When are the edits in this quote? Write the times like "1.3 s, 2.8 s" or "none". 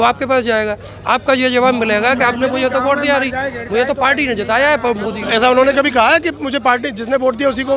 none